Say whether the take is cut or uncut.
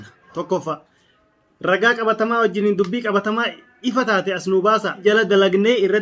cut